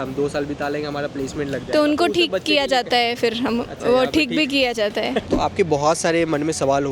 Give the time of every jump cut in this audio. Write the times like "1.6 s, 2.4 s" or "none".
5.2 s